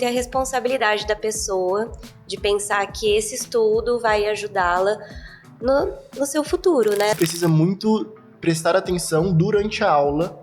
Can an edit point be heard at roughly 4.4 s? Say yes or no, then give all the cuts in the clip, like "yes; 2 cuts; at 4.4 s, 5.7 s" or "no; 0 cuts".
no; 1 cut; at 7.1 s